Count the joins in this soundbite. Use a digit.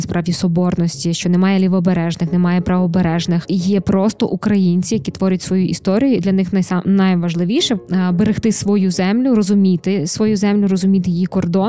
2